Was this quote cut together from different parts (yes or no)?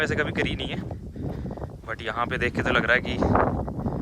no